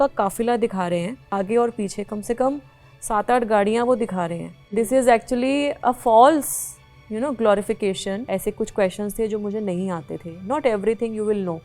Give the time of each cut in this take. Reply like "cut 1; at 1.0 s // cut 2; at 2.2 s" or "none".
cut 1; at 1.3 s // cut 2; at 4.6 s // cut 3; at 8.2 s